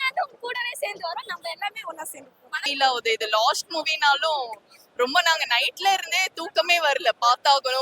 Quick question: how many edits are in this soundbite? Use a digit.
1